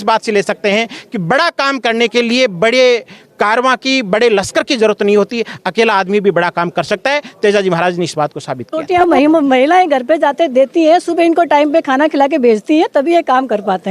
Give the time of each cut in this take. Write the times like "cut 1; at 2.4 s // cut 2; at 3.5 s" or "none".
cut 1; at 9.0 s